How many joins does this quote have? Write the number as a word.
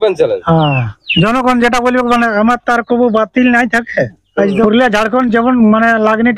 two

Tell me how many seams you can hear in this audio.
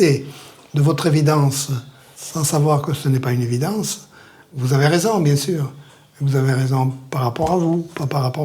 two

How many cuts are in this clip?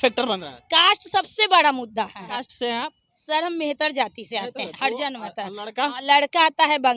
two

